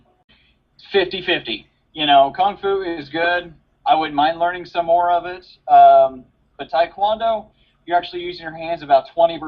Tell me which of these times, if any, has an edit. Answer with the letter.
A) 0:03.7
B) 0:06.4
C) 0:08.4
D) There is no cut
B